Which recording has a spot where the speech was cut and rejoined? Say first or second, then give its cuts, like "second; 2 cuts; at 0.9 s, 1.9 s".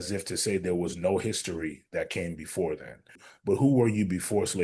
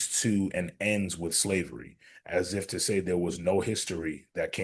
first; 1 cut; at 3.3 s